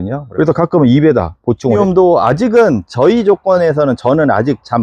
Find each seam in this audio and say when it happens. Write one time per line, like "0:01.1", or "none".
0:01.8